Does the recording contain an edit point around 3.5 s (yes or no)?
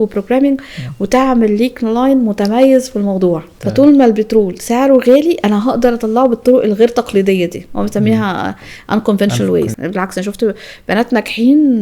yes